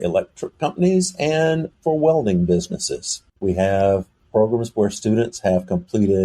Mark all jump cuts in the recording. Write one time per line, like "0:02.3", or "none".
none